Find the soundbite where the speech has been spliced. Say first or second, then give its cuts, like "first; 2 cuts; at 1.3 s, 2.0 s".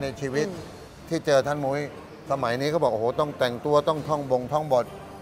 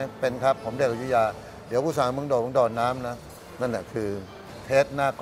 second; 1 cut; at 3.2 s